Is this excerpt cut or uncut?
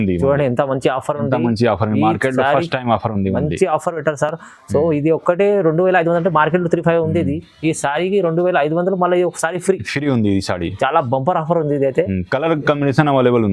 uncut